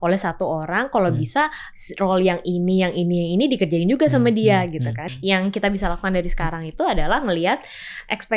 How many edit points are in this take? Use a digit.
1